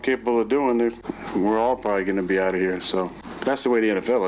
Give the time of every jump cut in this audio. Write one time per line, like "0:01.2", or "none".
0:01.1
0:03.2